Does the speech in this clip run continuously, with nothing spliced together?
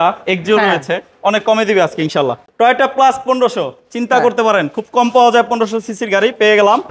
no; 1 cut; at 2.4 s

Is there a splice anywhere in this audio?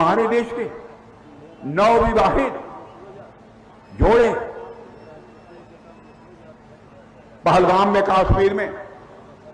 no; 0 cuts

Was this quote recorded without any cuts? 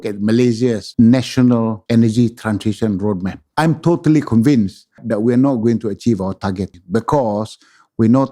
no; 5 cuts; at 0.8 s, 1.8 s, 3.4 s, 5.0 s, 6.7 s

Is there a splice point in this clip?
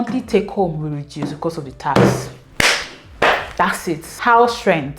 no; 0 cuts

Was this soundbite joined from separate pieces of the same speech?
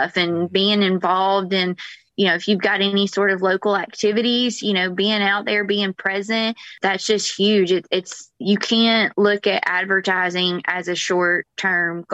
yes; 1 cut; at 6.8 s

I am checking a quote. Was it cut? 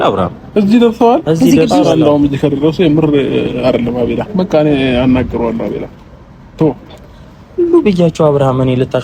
yes; 1 cut; at 4.2 s

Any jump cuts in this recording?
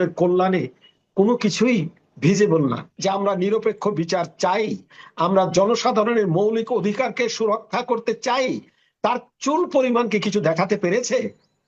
yes; 1 cut; at 2.9 s

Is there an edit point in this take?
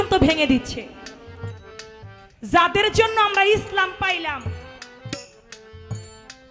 no; 0 cuts

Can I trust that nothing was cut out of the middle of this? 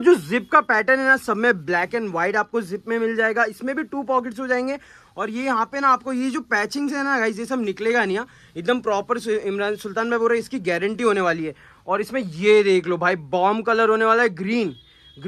yes; 0 cuts

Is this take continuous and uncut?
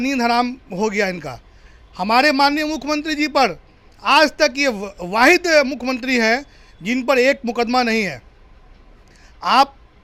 yes; 0 cuts

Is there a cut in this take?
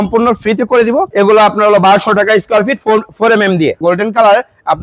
yes; 2 cuts; at 1.1 s, 3.8 s

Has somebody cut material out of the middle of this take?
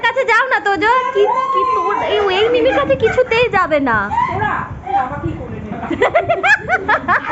no; 0 cuts

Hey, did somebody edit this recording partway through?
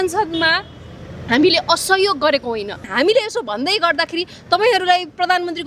yes; 1 cut; at 2.9 s

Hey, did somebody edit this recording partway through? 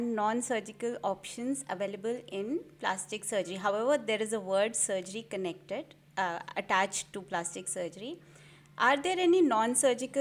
no; 0 cuts

